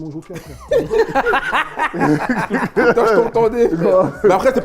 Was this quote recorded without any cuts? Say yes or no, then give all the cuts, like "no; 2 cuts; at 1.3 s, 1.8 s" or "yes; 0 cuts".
yes; 0 cuts